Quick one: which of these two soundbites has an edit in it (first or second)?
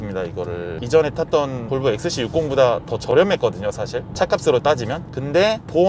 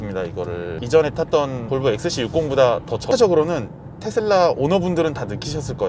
second